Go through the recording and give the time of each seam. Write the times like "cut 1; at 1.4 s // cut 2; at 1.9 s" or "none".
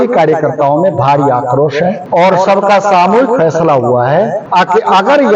cut 1; at 2.0 s // cut 2; at 4.4 s